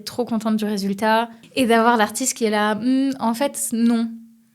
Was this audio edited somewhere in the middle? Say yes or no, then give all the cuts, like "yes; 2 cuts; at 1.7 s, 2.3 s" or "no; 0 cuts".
yes; 1 cut; at 1.4 s